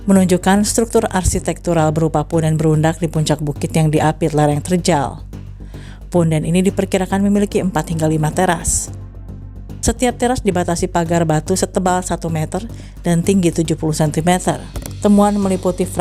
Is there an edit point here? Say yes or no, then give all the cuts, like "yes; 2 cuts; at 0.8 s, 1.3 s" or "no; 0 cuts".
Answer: yes; 1 cut; at 14.8 s